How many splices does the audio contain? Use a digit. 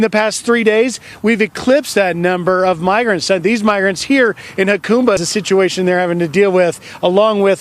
1